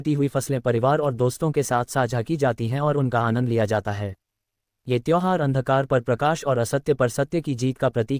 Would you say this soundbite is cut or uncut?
uncut